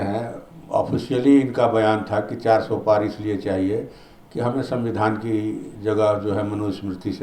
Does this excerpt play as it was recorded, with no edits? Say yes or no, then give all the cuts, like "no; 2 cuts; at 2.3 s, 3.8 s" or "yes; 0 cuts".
yes; 0 cuts